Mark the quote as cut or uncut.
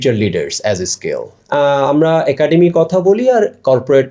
cut